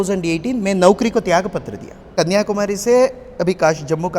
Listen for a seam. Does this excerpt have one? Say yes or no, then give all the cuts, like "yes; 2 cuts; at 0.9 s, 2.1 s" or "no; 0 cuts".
yes; 1 cut; at 2.1 s